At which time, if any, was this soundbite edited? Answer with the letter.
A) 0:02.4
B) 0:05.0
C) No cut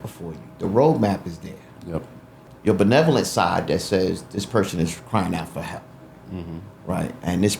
A